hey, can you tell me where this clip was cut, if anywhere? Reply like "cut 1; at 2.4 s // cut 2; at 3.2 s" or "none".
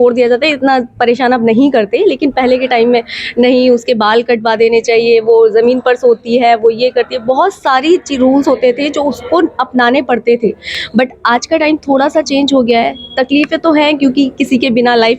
none

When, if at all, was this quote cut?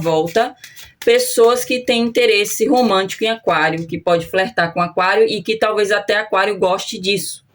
none

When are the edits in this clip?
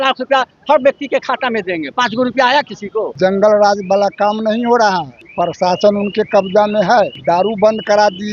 cut 1; at 3.1 s // cut 2; at 5.2 s // cut 3; at 7.2 s

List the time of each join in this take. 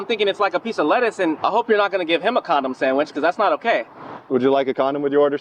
cut 1; at 1.4 s

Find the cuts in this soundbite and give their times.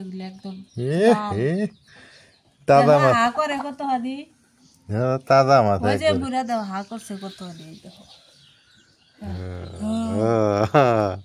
none

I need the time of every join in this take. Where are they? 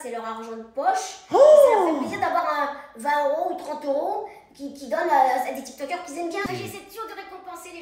cut 1; at 6.4 s

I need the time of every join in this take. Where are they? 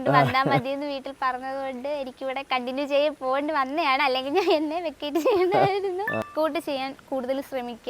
cut 1; at 6.3 s

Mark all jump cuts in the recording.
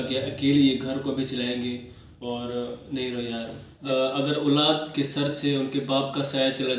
cut 1; at 3.7 s

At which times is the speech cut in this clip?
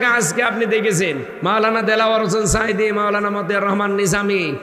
cut 1; at 1.3 s

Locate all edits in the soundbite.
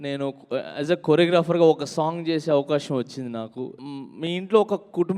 cut 1; at 3.8 s

